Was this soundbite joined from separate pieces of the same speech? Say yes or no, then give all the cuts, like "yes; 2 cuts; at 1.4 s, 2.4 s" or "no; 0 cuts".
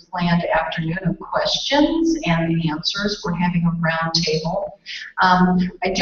no; 0 cuts